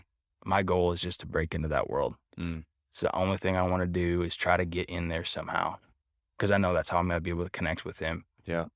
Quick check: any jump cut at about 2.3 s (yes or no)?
no